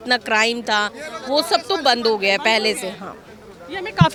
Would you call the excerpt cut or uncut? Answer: uncut